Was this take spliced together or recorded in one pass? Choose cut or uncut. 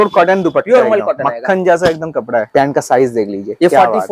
cut